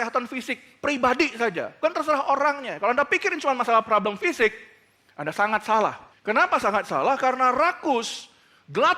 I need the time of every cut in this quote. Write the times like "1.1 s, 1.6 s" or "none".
1.8 s, 6.1 s